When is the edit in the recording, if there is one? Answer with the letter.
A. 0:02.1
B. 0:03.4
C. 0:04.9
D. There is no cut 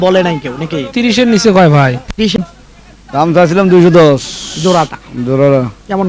A